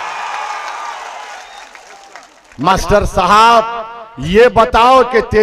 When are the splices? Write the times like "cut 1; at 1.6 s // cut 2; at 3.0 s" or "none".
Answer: cut 1; at 2.7 s